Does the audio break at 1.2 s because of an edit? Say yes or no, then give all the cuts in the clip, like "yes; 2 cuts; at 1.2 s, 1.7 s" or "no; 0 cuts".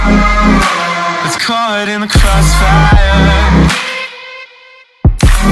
yes; 1 cut; at 1.2 s